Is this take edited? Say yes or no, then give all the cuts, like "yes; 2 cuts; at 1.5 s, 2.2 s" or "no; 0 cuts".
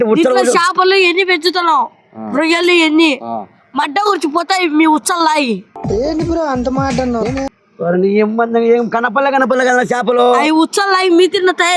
no; 0 cuts